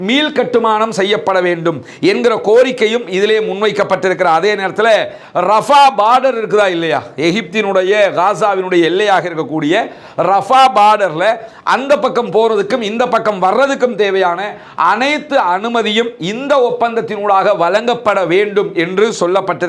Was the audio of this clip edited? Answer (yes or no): no